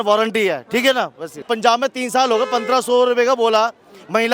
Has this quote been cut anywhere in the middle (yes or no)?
yes